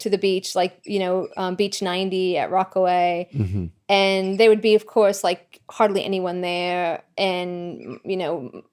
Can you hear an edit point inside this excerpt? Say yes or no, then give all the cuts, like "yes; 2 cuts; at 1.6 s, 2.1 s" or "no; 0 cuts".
no; 0 cuts